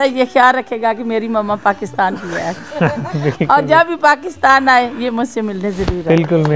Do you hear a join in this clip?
no; 0 cuts

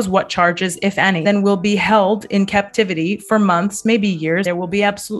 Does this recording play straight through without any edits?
no; 2 cuts; at 1.2 s, 4.5 s

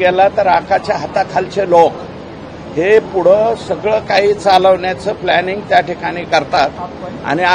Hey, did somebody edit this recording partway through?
no; 0 cuts

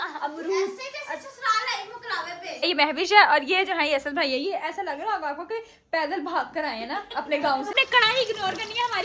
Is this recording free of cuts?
no; 2 cuts; at 2.7 s, 7.7 s

